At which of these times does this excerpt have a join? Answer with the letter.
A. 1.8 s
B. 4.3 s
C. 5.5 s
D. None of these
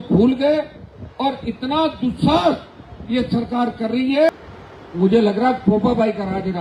B